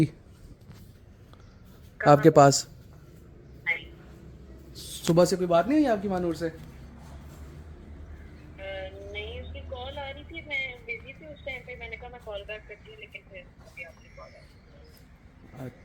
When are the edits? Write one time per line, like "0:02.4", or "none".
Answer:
none